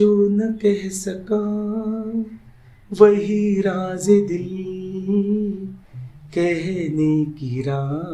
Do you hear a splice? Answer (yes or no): no